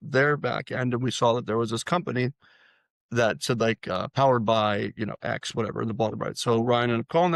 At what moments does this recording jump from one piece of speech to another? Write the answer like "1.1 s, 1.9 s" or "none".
none